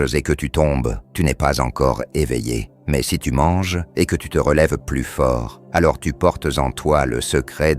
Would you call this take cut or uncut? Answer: cut